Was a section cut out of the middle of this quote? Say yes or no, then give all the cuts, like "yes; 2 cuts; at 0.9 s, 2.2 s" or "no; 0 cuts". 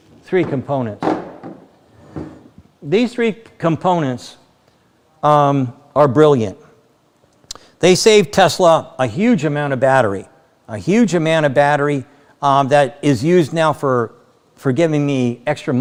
no; 0 cuts